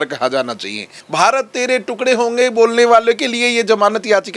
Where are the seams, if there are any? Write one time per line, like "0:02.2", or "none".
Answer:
0:01.0